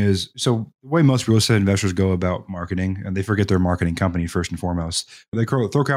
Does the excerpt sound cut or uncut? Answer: uncut